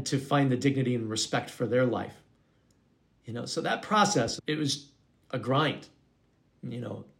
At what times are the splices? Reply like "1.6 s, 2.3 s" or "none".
4.3 s